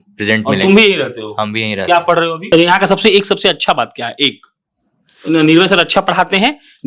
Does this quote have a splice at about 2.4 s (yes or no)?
yes